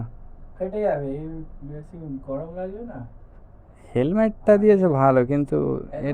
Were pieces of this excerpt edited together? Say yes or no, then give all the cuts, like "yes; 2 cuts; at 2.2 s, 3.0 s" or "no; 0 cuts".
no; 0 cuts